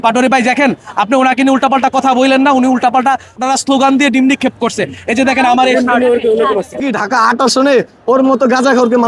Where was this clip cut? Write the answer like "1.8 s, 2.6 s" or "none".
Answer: 3.3 s, 6.8 s